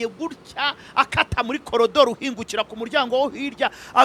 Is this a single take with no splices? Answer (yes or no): yes